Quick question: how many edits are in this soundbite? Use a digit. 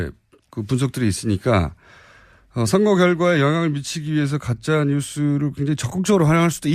1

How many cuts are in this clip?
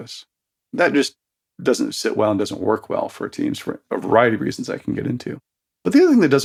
0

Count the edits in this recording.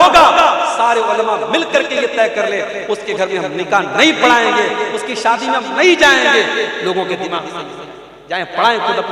0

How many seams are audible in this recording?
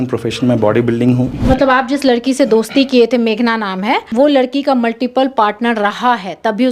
2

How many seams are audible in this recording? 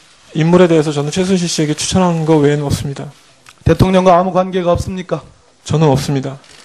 1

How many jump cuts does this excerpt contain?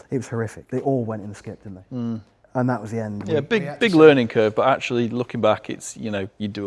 0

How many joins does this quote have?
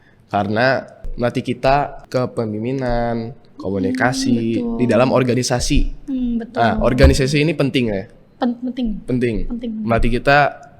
2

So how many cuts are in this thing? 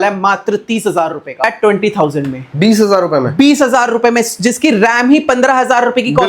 1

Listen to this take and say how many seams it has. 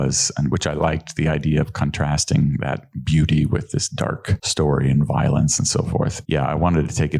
2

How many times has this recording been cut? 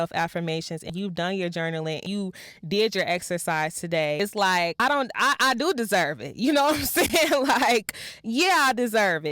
3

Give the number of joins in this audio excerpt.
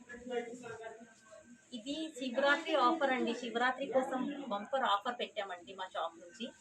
0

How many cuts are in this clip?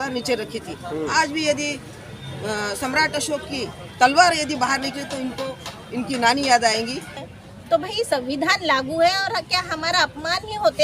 1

